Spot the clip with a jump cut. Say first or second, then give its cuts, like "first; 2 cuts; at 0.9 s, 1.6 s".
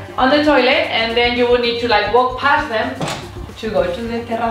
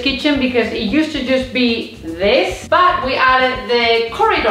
second; 1 cut; at 2.6 s